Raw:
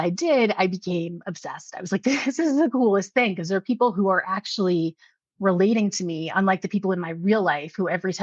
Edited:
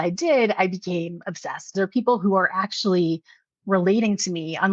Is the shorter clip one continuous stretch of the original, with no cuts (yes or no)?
no